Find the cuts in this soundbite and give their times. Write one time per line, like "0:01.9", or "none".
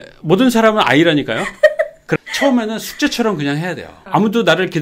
0:02.1
0:03.9